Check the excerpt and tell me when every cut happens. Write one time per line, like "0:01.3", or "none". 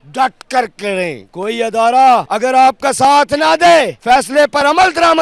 0:01.3
0:02.3
0:03.9